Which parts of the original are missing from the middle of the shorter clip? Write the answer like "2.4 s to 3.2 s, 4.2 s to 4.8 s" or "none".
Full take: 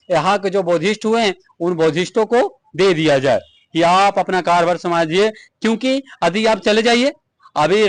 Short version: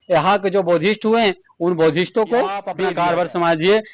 2.7 s to 4.2 s